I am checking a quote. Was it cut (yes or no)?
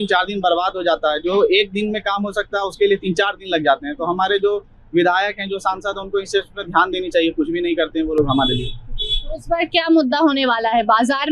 no